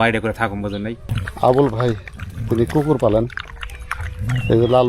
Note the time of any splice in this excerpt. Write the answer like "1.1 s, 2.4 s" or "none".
1.0 s